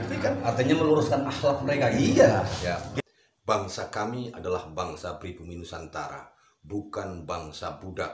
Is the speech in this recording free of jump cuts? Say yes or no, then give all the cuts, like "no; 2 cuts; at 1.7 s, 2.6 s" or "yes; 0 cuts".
no; 1 cut; at 2.9 s